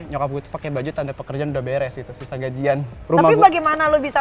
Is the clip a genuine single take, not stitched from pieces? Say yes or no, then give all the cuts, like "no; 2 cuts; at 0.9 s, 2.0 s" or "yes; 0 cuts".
no; 1 cut; at 2.9 s